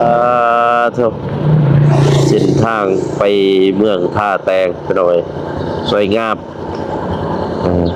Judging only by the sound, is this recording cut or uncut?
uncut